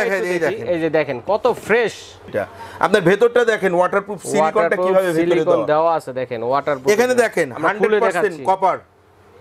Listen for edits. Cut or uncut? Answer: cut